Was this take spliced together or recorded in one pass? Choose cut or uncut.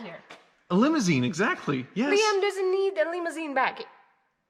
uncut